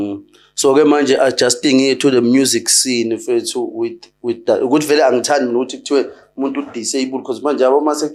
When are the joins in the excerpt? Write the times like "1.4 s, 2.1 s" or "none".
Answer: none